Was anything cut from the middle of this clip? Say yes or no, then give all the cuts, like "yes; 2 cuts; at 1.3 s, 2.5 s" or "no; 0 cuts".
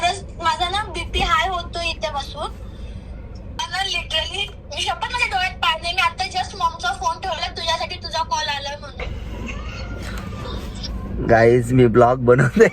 yes; 2 cuts; at 3.6 s, 9.0 s